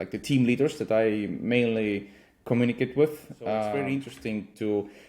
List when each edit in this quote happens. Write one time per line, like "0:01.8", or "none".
0:03.8

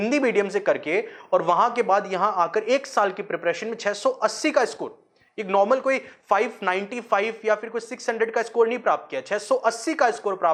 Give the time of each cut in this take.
none

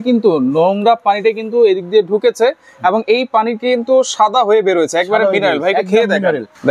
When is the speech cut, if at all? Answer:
none

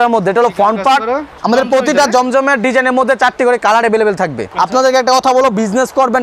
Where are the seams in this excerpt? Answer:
0:01.3
0:04.5

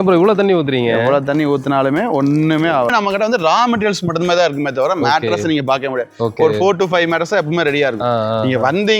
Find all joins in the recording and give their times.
0:02.9

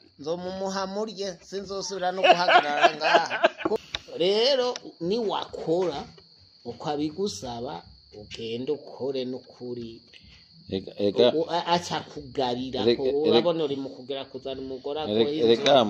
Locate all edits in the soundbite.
0:03.8

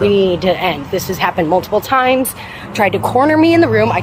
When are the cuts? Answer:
0:02.6

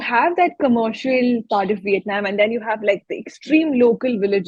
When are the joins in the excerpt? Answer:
none

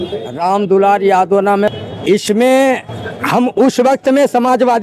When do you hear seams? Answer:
0:01.8

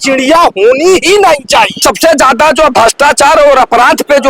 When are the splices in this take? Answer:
0:01.8

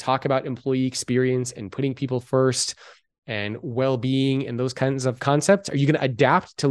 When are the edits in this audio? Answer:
none

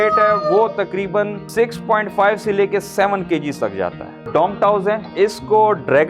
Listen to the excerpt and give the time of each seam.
0:01.4
0:04.2
0:05.1

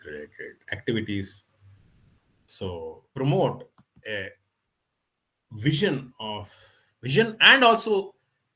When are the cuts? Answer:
0:03.0

